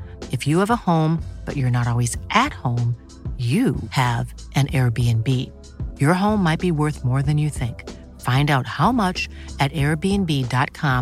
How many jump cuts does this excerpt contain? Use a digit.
0